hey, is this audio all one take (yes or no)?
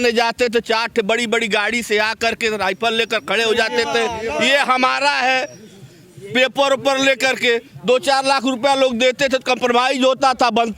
yes